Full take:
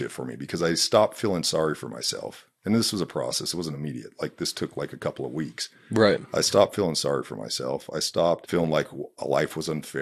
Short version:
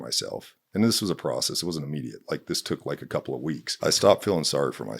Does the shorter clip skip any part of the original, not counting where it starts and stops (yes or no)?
yes